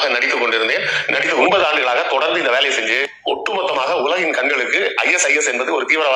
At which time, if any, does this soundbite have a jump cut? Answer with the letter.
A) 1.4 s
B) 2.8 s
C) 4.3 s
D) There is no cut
A